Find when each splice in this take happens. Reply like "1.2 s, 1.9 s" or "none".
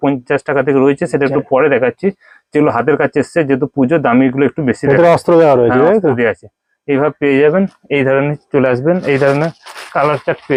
none